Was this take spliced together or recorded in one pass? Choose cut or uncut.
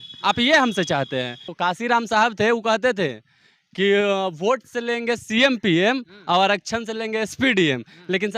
cut